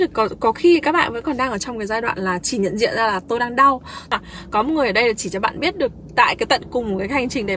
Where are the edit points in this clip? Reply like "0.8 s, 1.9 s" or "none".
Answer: 4.1 s